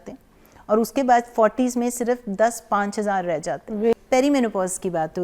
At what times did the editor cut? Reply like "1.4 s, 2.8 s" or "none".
3.9 s